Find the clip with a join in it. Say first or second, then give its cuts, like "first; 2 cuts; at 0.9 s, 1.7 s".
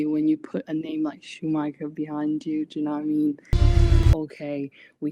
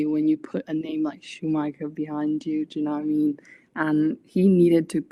first; 1 cut; at 3.8 s